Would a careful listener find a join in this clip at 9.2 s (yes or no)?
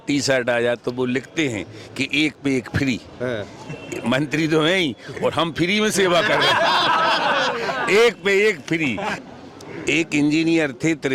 yes